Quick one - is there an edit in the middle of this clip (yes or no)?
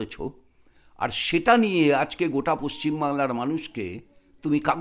no